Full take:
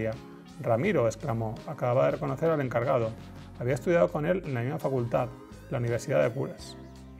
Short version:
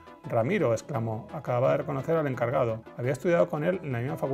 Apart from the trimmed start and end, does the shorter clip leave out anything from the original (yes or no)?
yes